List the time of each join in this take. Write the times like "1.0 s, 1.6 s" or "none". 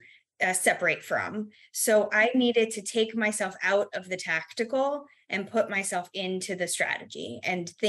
none